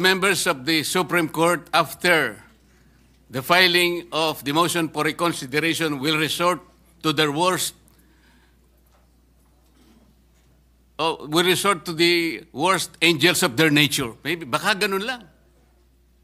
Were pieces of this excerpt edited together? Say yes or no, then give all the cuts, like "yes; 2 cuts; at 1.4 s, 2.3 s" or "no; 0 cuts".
no; 0 cuts